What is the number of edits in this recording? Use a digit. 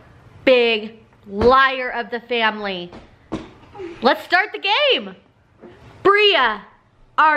1